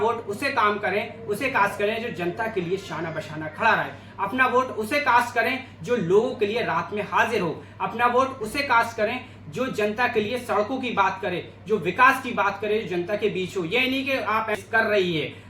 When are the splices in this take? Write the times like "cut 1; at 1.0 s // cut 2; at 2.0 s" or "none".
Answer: cut 1; at 14.5 s